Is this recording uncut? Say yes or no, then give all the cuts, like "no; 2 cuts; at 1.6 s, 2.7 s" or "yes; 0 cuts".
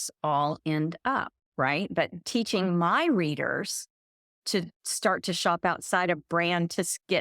no; 2 cuts; at 2.2 s, 4.3 s